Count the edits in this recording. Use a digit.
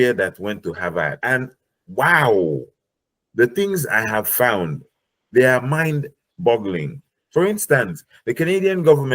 1